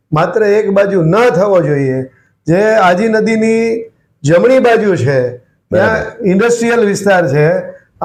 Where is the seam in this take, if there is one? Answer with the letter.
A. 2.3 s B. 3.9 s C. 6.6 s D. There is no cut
D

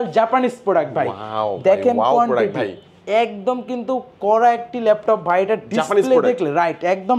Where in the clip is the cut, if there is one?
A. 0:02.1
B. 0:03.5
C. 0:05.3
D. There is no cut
D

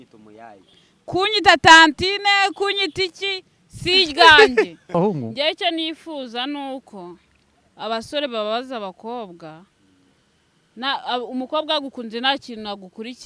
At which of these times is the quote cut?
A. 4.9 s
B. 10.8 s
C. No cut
A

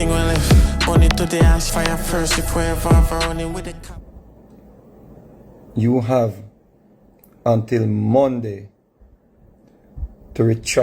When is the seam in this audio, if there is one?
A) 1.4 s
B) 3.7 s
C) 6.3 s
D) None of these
B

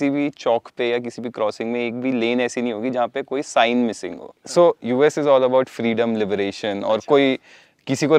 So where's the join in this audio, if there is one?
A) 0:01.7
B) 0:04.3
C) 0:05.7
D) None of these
B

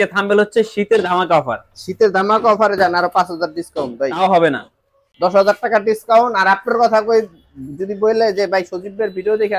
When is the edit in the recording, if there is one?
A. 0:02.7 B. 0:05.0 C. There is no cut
B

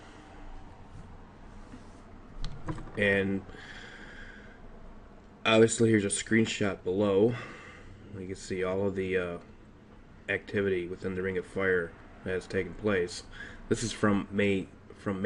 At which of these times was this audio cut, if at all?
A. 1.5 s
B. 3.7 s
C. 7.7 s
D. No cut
A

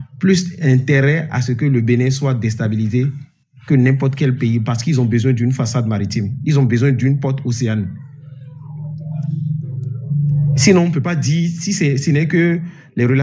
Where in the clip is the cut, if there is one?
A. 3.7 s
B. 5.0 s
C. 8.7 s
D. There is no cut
D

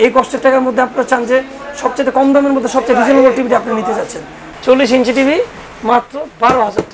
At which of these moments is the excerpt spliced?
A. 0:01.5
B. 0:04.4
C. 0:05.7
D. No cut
B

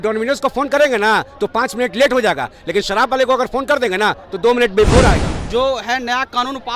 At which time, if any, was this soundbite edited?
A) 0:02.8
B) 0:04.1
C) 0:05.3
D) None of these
C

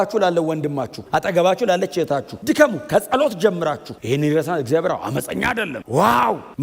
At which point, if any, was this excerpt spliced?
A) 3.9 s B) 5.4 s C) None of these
A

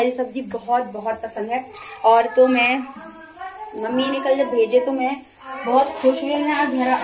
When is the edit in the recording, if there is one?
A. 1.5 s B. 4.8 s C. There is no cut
C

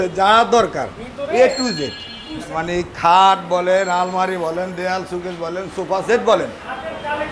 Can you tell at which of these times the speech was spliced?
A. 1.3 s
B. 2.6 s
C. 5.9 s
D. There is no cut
B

